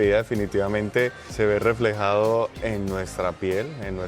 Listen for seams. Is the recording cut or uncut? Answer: cut